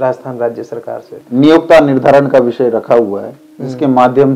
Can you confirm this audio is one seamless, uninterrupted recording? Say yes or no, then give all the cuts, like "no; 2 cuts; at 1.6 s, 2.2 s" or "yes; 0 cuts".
no; 1 cut; at 1.2 s